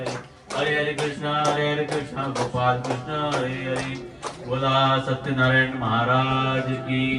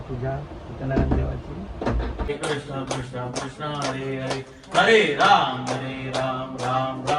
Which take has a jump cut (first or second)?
second